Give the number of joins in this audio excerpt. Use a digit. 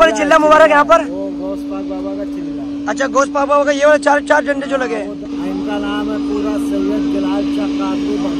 0